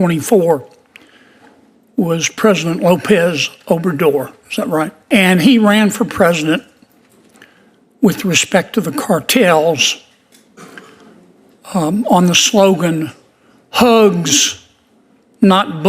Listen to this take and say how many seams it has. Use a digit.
1